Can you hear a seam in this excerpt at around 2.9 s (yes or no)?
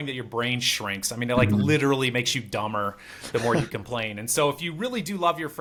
no